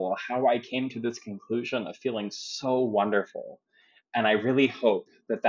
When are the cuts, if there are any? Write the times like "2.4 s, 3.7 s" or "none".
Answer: none